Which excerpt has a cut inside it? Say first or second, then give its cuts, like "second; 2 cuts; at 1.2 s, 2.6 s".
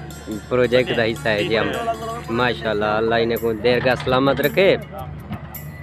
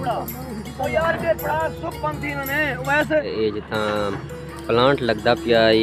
second; 1 cut; at 3.3 s